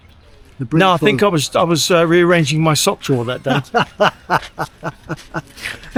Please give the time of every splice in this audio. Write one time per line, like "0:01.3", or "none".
none

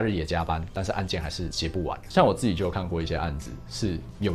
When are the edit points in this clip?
0:02.0

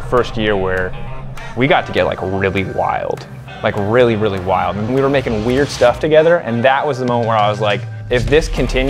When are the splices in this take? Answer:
0:04.8

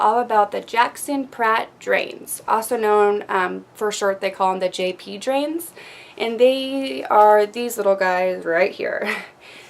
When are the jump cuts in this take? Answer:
0:03.2

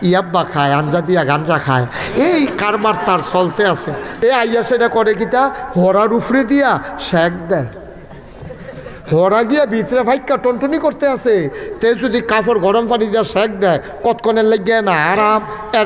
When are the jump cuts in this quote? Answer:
0:04.1

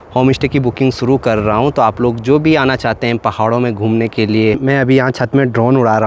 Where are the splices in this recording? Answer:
0:04.6

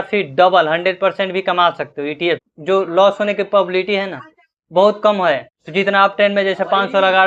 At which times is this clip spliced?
0:02.5
0:05.6

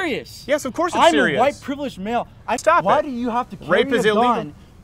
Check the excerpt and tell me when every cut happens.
0:02.5

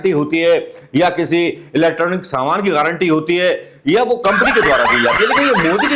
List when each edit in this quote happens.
none

